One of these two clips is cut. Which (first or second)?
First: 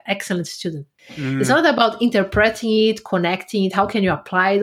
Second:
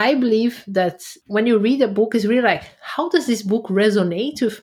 first